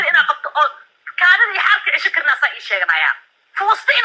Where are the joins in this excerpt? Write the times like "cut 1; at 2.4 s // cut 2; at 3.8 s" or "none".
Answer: none